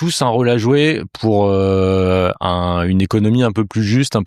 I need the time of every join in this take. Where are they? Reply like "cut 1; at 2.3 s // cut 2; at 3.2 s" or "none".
none